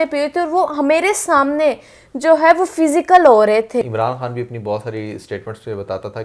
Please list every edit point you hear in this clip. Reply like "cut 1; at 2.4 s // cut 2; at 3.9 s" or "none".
cut 1; at 3.9 s